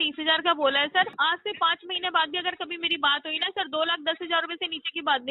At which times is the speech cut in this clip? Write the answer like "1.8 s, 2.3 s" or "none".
1.1 s